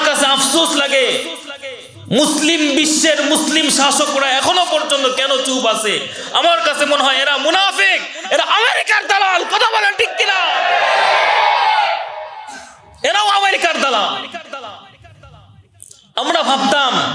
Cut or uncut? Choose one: uncut